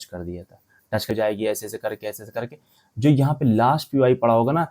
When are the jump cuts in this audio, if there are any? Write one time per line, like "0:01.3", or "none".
0:01.1